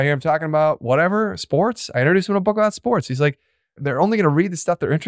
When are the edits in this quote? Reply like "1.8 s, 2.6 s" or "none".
3.8 s